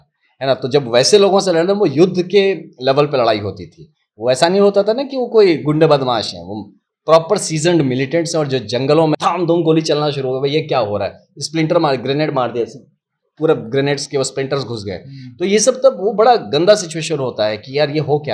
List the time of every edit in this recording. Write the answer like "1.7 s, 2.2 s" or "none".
9.2 s